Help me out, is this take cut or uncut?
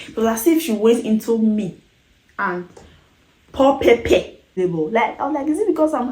cut